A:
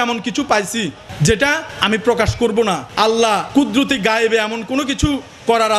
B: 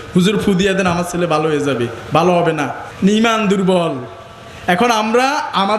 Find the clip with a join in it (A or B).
B